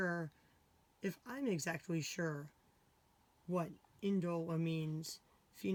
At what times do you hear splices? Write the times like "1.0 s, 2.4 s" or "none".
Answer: none